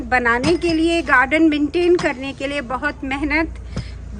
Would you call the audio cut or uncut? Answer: uncut